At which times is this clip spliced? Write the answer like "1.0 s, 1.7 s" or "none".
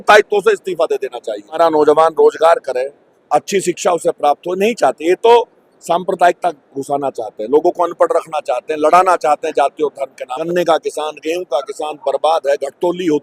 1.6 s, 10.4 s